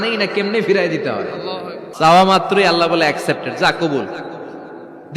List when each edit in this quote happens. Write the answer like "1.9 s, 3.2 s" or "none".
1.8 s